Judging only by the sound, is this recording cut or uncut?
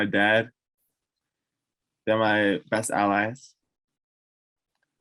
uncut